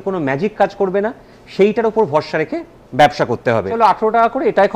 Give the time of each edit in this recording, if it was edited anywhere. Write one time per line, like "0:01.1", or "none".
0:03.7